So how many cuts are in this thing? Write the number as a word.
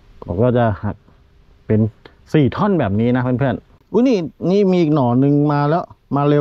one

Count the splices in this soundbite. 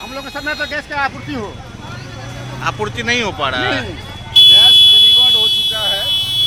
zero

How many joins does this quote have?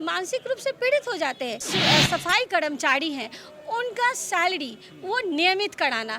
one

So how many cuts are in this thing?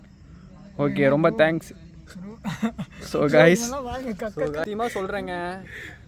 one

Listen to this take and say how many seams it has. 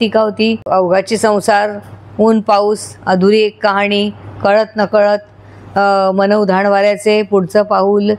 zero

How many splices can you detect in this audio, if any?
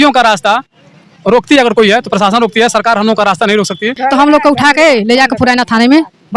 one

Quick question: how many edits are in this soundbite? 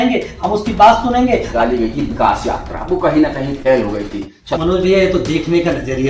two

